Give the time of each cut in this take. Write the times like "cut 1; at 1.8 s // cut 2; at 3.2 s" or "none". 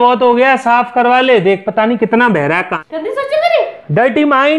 cut 1; at 2.7 s

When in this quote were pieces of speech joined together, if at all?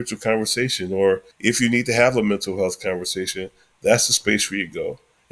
cut 1; at 1.3 s

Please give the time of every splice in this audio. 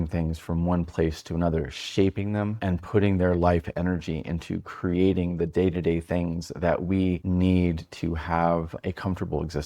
cut 1; at 2.6 s // cut 2; at 7.2 s // cut 3; at 8.7 s

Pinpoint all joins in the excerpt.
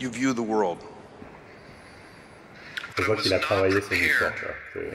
none

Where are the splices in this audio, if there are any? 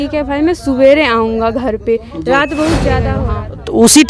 cut 1; at 3.2 s

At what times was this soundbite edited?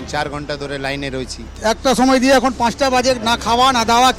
cut 1; at 1.4 s

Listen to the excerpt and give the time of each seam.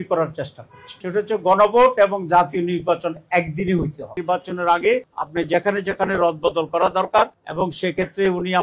cut 1; at 4.2 s // cut 2; at 7.4 s

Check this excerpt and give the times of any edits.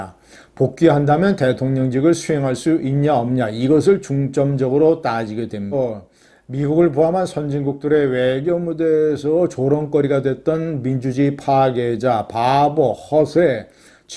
cut 1; at 5.7 s

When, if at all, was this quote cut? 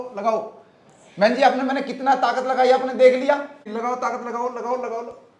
cut 1; at 3.7 s

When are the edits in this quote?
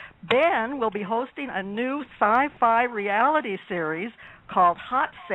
none

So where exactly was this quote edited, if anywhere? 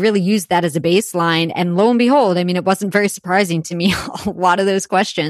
none

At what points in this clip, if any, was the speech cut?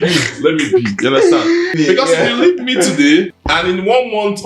cut 1; at 1.7 s // cut 2; at 3.4 s

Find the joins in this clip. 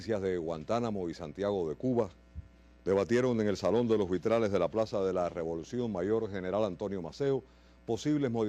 cut 1; at 3.6 s

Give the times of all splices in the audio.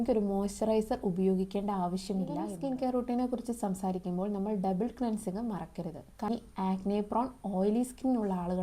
cut 1; at 2.6 s // cut 2; at 6.3 s

